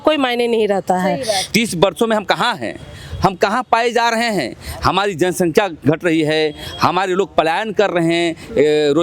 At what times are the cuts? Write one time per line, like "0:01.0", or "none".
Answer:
0:01.4